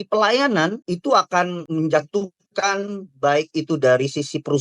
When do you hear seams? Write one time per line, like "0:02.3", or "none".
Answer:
0:00.8
0:01.6